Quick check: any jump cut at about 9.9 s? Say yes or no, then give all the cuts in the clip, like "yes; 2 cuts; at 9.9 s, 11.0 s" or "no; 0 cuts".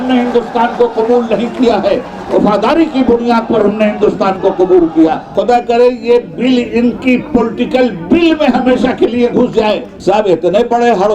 yes; 2 cuts; at 5.3 s, 9.9 s